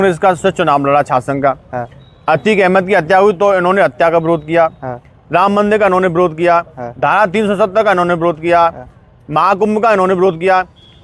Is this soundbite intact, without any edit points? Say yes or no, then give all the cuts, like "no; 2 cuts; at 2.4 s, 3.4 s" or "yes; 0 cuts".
yes; 0 cuts